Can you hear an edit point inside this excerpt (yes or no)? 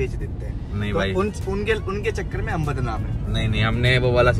no